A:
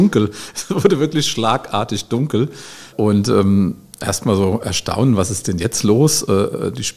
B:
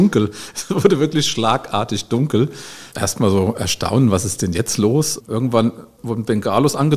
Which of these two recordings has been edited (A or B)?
B